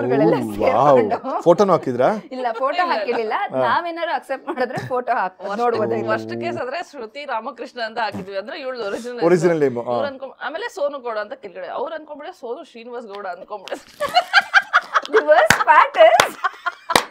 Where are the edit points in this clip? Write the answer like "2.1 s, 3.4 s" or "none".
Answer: none